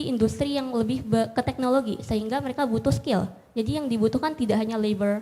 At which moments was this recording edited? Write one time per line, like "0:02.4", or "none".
none